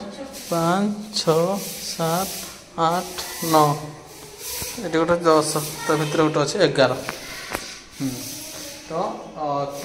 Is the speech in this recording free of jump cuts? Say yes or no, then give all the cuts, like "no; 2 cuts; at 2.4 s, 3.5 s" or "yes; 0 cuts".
yes; 0 cuts